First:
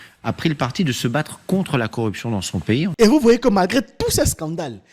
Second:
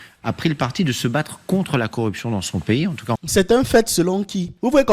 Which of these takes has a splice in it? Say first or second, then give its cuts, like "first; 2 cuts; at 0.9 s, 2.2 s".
first; 1 cut; at 2.9 s